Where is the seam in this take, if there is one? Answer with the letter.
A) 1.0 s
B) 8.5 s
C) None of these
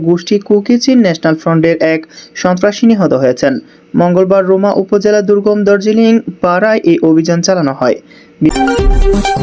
B